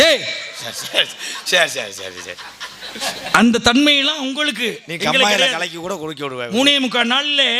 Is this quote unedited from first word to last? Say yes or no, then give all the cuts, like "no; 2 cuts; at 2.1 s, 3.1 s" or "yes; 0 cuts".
yes; 0 cuts